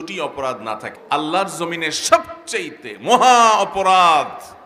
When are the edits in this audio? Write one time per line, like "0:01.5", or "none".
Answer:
0:00.9